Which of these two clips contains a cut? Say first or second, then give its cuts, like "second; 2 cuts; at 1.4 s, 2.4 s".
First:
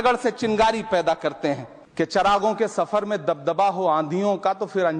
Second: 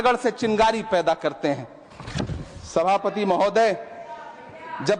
first; 1 cut; at 1.8 s